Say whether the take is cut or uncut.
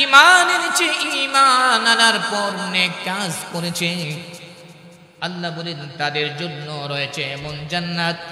uncut